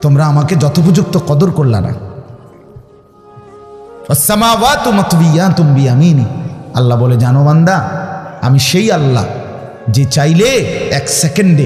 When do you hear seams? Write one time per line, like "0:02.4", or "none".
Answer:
none